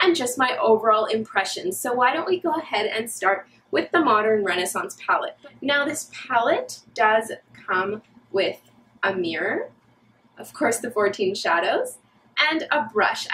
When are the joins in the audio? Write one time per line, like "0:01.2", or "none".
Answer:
0:01.8